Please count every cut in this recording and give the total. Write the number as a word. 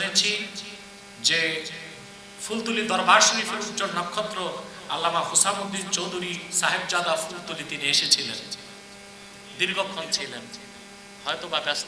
zero